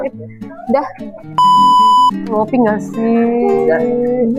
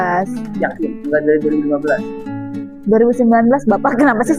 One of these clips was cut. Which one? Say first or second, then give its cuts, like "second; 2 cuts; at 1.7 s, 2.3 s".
first; 2 cuts; at 1.3 s, 2.3 s